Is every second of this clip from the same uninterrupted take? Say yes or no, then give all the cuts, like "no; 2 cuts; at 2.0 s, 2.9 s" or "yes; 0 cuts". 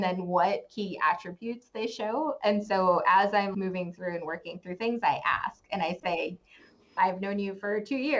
yes; 0 cuts